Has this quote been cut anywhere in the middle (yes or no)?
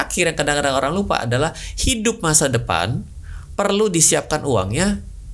no